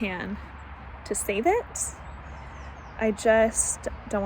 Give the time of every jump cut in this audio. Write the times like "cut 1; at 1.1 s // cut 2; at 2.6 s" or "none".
none